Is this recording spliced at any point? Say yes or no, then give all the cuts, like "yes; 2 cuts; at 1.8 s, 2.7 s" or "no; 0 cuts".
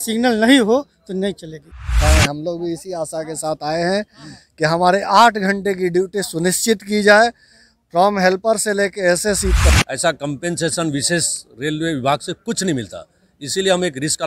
yes; 2 cuts; at 2.0 s, 9.7 s